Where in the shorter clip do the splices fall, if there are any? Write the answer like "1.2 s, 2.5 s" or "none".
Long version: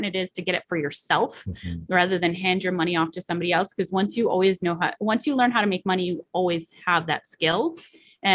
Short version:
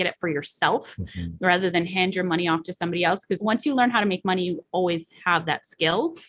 3.4 s

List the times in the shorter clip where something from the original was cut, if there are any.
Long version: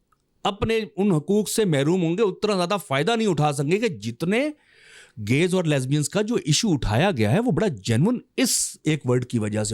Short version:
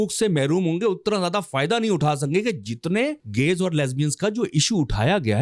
3.2 s

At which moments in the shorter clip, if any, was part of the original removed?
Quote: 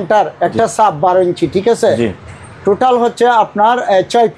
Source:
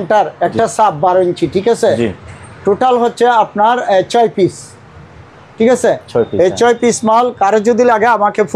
none

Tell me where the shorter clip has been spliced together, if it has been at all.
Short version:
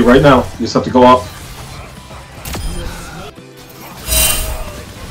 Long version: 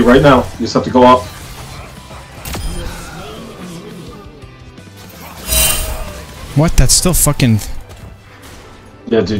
3.4 s

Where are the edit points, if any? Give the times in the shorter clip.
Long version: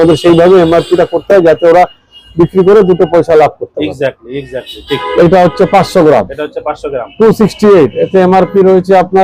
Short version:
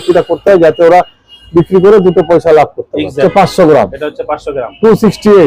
3.2 s

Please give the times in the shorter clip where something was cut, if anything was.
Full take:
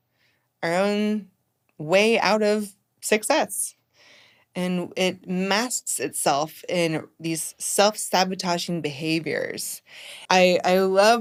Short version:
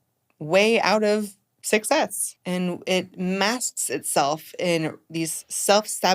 2.3 s

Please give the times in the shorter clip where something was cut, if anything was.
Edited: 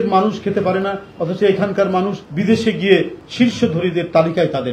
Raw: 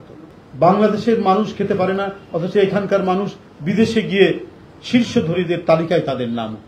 2.2 s, 3.2 s

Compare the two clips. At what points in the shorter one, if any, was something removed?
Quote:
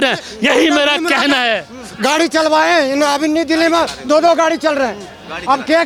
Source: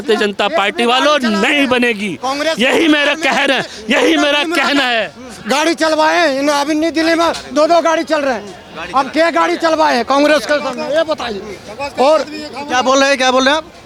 none

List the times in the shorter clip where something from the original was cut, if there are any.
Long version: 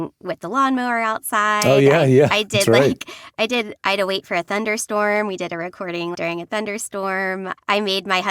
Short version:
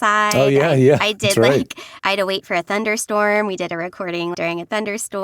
1.9 s

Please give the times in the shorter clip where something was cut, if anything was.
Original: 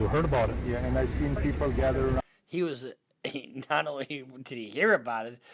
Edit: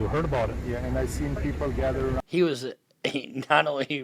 2.3 s

